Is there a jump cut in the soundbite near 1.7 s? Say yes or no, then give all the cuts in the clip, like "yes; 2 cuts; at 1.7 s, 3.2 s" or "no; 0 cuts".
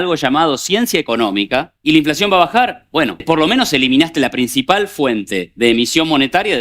yes; 2 cuts; at 1.7 s, 3.2 s